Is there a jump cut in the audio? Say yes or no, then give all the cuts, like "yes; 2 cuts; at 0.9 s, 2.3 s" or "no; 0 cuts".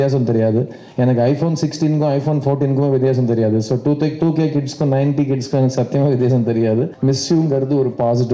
yes; 1 cut; at 6.9 s